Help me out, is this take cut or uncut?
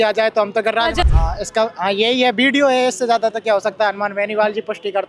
cut